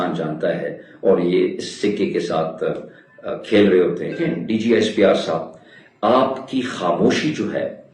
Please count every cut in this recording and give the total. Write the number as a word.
one